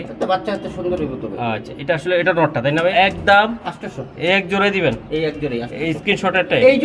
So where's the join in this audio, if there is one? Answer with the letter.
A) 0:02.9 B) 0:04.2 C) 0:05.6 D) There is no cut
A